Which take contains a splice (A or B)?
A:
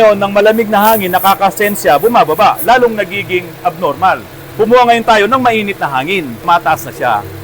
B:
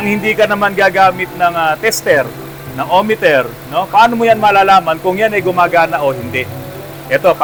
A